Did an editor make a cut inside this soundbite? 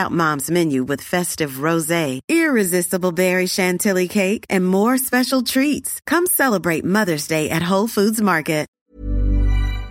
yes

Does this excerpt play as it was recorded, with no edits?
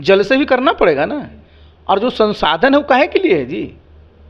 yes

